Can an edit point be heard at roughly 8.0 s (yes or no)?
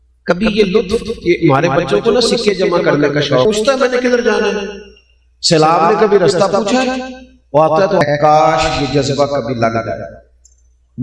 yes